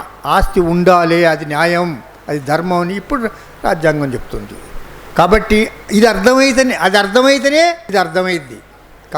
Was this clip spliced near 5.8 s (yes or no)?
no